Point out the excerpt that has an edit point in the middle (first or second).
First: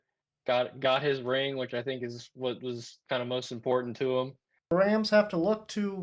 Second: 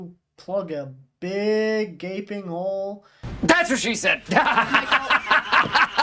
first